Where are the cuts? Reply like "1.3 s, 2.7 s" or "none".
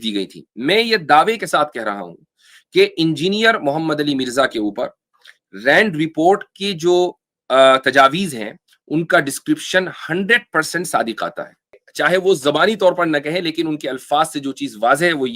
11.8 s